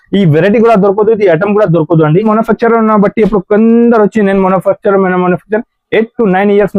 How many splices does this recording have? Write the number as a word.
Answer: one